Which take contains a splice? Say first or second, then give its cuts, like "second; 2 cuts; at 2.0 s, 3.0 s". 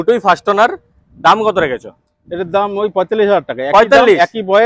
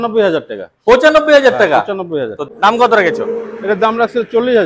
second; 1 cut; at 2.4 s